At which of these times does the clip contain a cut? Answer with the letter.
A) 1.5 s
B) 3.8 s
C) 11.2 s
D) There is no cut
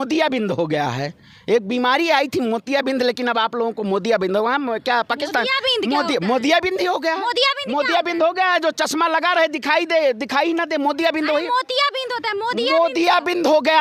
D